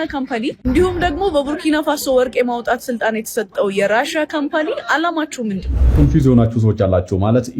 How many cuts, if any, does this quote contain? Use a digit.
1